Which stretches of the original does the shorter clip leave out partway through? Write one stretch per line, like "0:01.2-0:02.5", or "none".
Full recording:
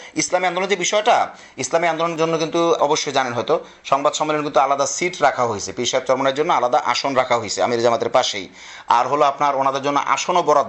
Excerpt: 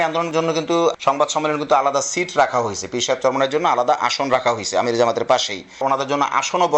0:02.8-0:03.8
0:08.6-0:09.5